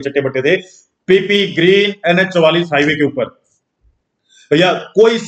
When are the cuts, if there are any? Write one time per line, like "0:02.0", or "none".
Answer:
none